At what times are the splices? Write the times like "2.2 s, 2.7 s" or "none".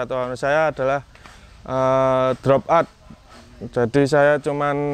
none